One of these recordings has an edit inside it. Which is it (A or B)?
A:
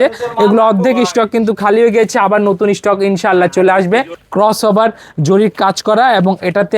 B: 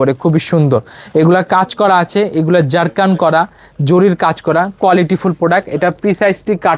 A